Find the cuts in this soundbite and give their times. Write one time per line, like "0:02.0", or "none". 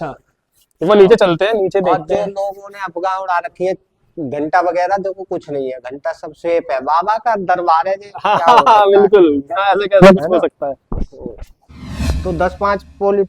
0:12.0